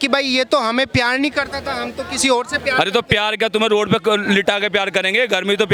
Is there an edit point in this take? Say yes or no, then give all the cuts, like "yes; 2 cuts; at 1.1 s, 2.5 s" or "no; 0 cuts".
no; 0 cuts